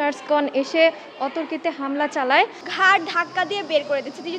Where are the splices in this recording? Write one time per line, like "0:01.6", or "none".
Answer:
0:02.6